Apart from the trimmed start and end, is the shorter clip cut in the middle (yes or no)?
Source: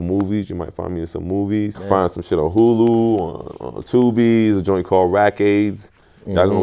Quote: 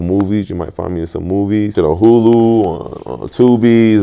yes